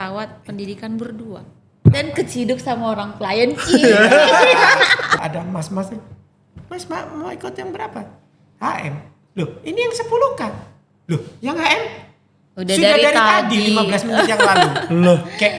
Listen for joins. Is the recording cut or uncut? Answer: cut